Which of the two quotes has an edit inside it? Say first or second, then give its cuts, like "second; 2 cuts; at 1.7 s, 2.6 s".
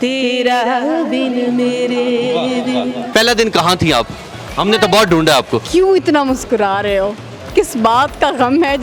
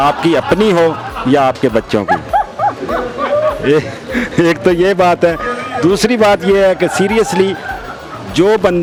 first; 2 cuts; at 3.0 s, 5.6 s